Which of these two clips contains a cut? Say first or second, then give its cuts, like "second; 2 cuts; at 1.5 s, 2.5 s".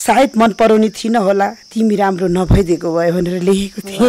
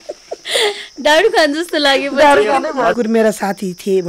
second; 1 cut; at 2.9 s